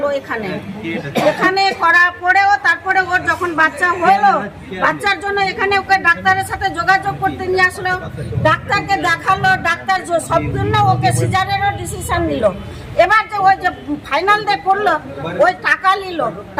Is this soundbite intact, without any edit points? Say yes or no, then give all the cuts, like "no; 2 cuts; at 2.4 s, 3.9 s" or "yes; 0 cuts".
yes; 0 cuts